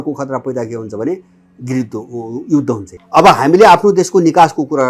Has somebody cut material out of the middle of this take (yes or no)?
yes